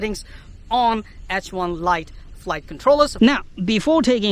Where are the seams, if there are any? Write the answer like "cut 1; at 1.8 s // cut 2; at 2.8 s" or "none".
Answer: cut 1; at 3.1 s